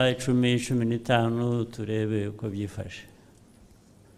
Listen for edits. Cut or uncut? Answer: uncut